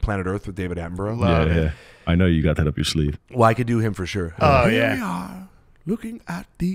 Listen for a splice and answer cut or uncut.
cut